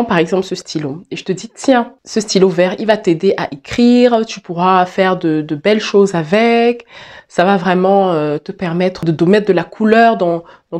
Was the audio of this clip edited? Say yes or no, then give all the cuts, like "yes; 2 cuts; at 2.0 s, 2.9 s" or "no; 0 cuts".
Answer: yes; 2 cuts; at 2.0 s, 9.0 s